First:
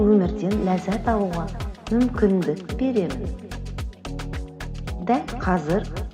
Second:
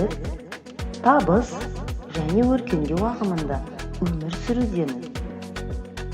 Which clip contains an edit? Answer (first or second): second